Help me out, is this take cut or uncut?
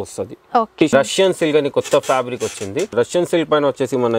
cut